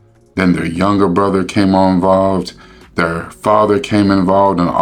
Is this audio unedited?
yes; 0 cuts

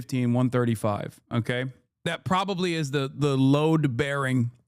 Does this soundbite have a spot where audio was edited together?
yes; 1 cut; at 1.8 s

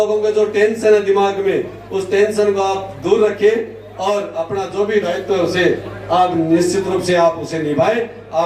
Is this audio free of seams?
yes; 0 cuts

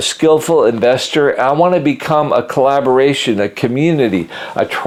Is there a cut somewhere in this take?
no; 0 cuts

